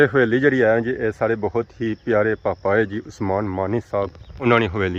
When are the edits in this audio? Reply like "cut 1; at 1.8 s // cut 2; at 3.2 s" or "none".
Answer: none

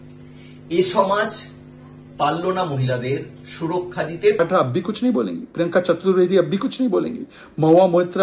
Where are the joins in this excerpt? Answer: cut 1; at 4.4 s

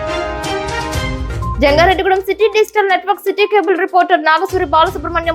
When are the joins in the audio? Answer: none

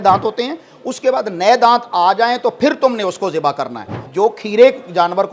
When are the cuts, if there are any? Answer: cut 1; at 4.0 s

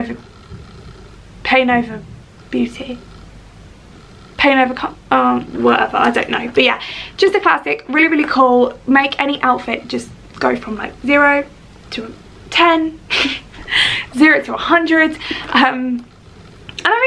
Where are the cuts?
none

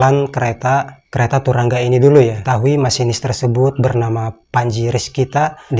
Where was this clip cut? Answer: cut 1; at 2.4 s

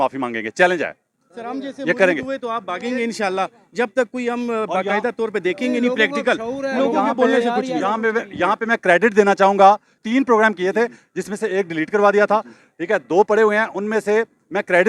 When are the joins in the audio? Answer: none

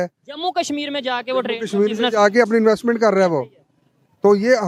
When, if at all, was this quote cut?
none

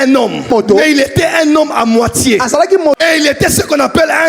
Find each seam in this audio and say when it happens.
cut 1; at 3.0 s

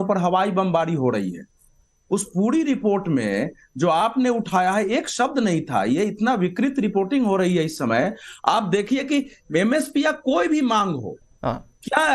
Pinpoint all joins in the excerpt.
none

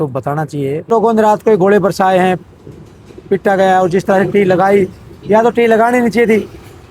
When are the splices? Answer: cut 1; at 0.9 s

